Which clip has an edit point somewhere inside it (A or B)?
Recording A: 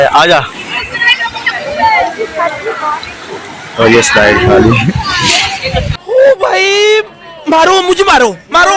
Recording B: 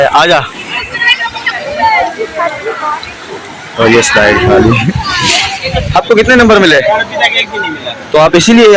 B